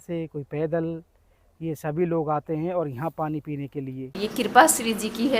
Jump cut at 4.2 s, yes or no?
yes